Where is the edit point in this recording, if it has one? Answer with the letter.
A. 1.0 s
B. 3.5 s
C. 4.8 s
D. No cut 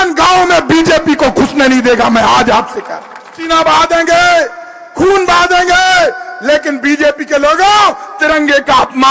B